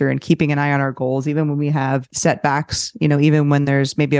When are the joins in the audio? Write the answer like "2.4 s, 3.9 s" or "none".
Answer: 2.1 s